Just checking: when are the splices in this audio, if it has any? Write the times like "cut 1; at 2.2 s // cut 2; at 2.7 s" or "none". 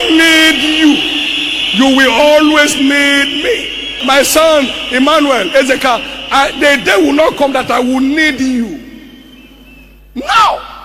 cut 1; at 4.0 s